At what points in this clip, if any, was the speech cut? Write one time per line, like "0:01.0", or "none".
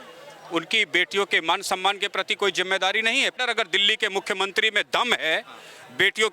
0:03.4